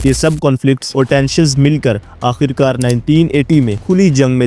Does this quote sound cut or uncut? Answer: uncut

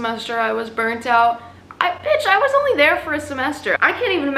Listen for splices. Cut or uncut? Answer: uncut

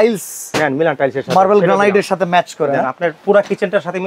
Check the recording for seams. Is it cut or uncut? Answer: uncut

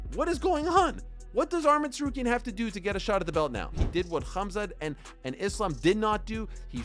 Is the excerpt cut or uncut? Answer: cut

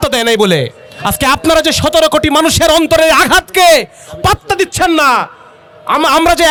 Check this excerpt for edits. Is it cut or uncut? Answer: uncut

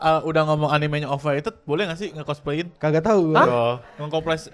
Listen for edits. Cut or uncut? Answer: cut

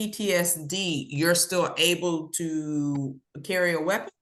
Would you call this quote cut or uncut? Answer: uncut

